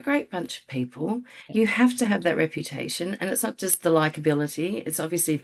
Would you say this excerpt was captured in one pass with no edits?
yes; 0 cuts

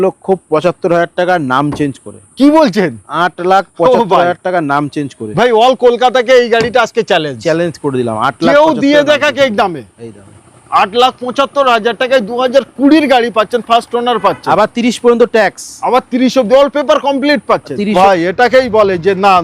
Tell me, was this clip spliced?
yes; 1 cut; at 17.9 s

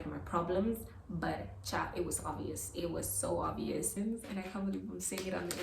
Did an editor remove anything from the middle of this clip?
yes; 1 cut; at 3.9 s

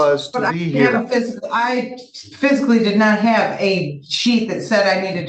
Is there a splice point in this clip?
no; 0 cuts

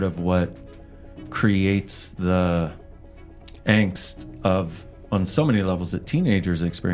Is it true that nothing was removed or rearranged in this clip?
yes; 0 cuts

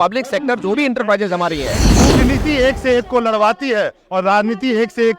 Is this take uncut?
no; 1 cut; at 1.8 s

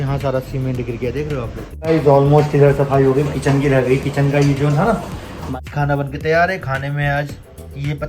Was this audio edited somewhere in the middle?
yes; 2 cuts; at 1.8 s, 5.5 s

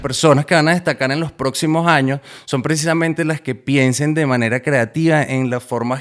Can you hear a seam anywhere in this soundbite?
no; 0 cuts

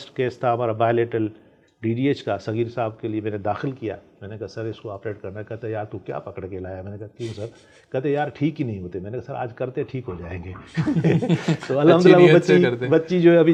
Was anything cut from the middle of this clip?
no; 0 cuts

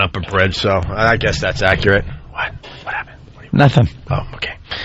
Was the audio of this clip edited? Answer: no; 0 cuts

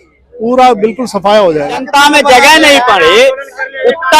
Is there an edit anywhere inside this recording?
yes; 1 cut; at 1.9 s

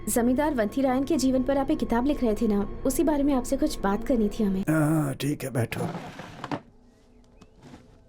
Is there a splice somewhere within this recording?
yes; 1 cut; at 4.6 s

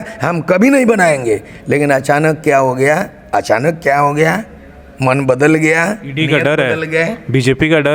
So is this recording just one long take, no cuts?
yes; 0 cuts

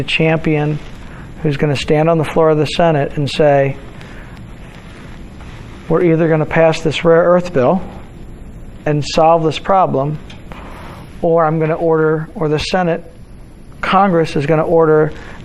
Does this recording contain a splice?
no; 0 cuts

